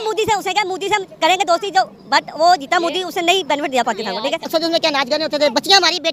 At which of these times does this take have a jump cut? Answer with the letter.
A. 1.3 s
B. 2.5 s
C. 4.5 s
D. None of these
C